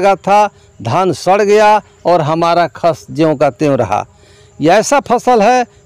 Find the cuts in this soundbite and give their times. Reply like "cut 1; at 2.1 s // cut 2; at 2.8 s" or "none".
none